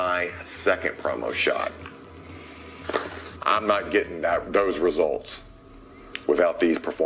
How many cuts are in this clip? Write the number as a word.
zero